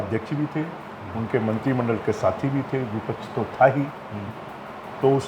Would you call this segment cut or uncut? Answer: uncut